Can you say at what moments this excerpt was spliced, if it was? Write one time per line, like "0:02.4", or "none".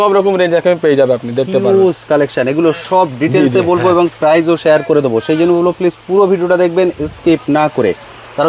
none